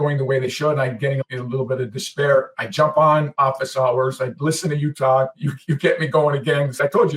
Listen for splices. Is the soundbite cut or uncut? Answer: uncut